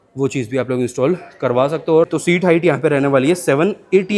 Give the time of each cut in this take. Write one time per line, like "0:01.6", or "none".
0:02.1